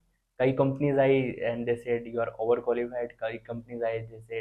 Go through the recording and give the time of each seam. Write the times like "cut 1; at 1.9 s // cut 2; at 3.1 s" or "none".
none

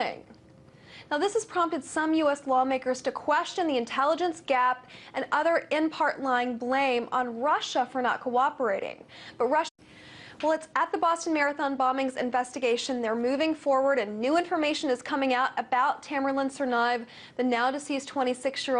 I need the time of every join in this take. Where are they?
none

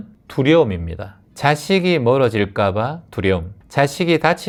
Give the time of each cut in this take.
none

